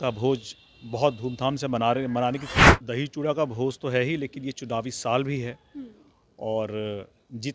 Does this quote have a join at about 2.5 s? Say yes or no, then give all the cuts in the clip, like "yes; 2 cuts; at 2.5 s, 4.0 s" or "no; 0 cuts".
yes; 1 cut; at 2.5 s